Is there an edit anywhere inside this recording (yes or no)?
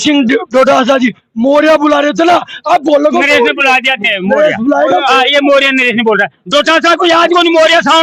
no